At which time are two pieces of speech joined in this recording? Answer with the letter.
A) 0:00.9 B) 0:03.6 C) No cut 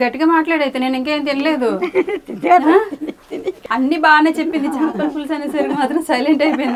B